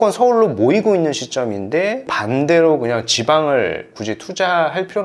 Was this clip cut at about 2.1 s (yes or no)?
yes